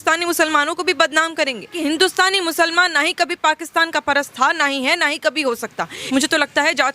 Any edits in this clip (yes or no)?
yes